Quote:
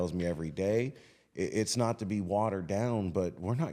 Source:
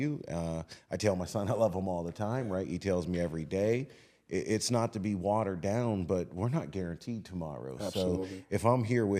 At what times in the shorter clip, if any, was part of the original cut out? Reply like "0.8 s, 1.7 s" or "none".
none